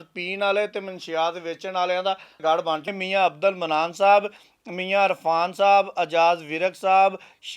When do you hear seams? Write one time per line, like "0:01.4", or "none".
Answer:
0:02.9